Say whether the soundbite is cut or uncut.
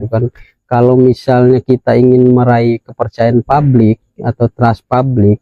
uncut